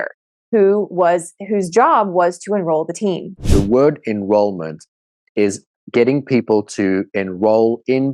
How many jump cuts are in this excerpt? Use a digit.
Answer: 1